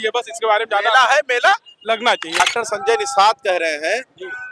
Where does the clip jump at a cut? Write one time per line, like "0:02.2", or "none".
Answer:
0:02.4